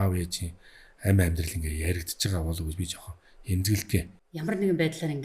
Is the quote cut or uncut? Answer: cut